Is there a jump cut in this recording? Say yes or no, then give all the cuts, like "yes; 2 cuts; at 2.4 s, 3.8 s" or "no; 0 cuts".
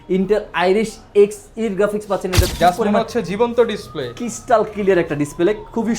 yes; 1 cut; at 2.5 s